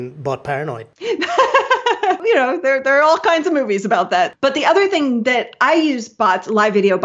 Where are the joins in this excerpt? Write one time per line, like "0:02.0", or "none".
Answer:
0:00.9
0:02.2